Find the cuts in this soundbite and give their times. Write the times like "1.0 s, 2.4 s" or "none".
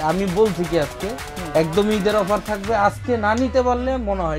none